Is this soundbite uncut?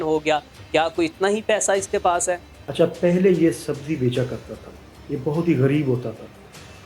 no; 1 cut; at 2.7 s

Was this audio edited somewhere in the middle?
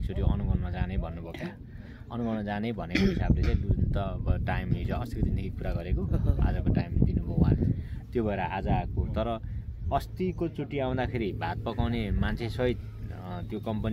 no; 0 cuts

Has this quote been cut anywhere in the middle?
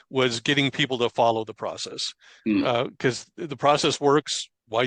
no; 0 cuts

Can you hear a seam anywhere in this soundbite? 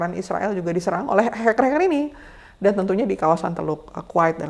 no; 0 cuts

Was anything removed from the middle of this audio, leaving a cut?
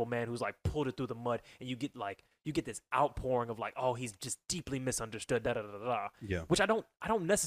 no; 0 cuts

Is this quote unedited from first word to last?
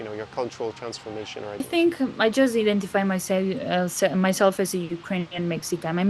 no; 1 cut; at 1.5 s

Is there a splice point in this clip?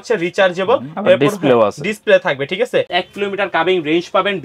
yes; 1 cut; at 2.9 s

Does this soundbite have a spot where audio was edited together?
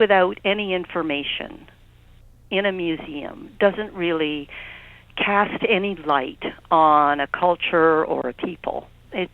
no; 0 cuts

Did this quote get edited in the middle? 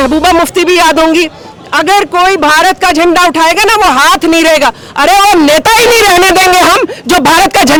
no; 0 cuts

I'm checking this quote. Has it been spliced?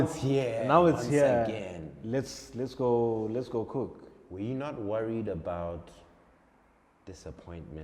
no; 0 cuts

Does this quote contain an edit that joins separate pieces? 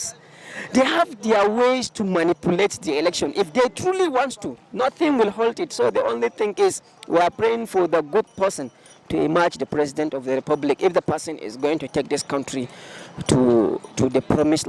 no; 0 cuts

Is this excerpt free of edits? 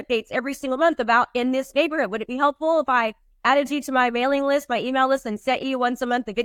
yes; 0 cuts

